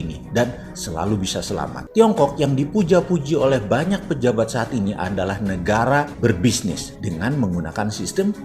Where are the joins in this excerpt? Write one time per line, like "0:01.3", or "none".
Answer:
0:01.8